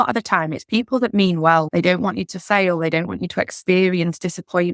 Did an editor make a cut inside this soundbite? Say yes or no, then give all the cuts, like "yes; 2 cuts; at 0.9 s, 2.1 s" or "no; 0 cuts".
yes; 1 cut; at 1.7 s